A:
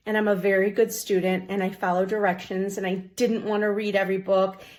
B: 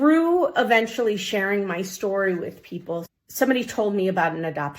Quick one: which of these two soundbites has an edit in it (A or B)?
B